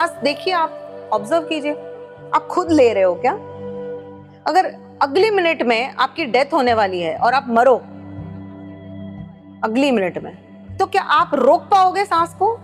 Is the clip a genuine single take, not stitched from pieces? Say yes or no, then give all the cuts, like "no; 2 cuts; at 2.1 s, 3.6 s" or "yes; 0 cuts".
yes; 0 cuts